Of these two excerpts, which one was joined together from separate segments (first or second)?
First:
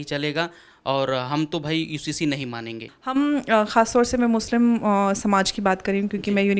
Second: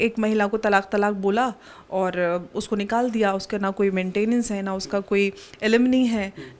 first